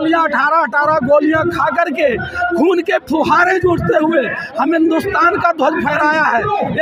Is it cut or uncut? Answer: uncut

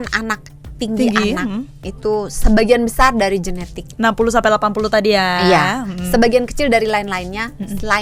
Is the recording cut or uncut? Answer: uncut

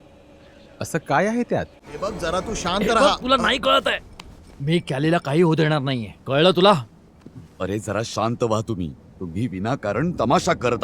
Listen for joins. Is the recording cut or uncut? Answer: cut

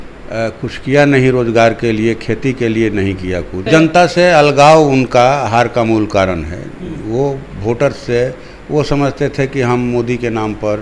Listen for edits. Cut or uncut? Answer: cut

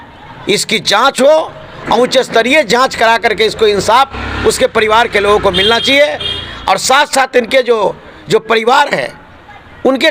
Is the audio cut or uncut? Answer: uncut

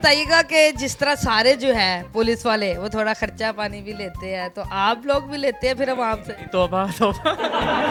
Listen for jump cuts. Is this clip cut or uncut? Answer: uncut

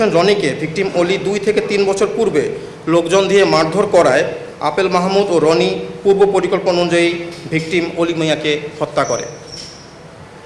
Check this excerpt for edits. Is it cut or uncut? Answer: uncut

